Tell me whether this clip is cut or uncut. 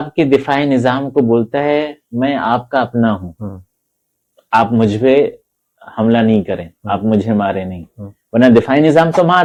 uncut